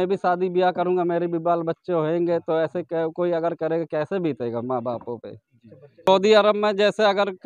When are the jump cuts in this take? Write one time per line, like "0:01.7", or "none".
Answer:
0:06.1